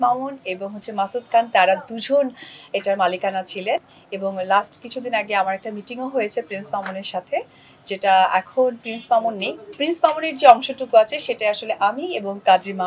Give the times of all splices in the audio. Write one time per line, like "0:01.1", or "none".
none